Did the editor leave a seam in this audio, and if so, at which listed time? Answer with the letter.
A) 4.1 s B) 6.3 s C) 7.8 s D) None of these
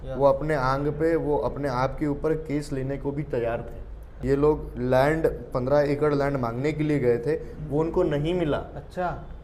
A